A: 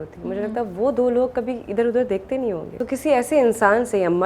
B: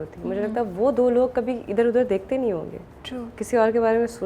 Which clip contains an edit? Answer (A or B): A